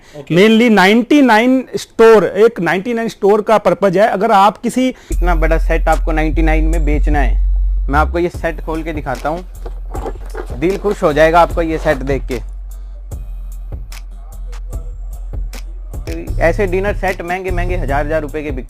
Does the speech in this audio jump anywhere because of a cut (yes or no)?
yes